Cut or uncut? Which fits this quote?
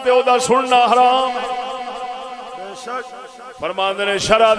uncut